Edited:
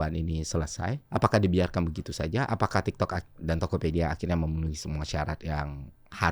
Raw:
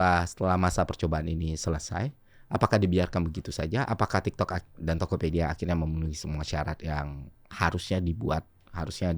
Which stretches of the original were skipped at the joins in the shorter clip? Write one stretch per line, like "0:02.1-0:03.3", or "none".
0:02.1-0:02.4